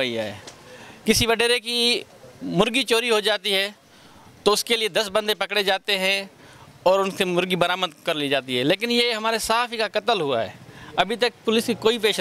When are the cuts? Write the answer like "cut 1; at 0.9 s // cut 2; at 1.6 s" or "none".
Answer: none